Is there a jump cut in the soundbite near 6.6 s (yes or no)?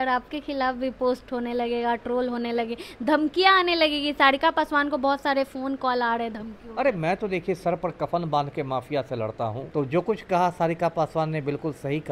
no